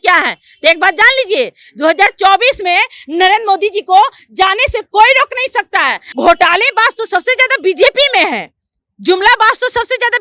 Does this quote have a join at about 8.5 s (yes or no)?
no